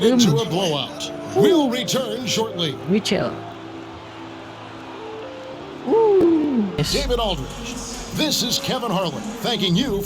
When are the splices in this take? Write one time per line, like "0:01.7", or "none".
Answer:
0:06.8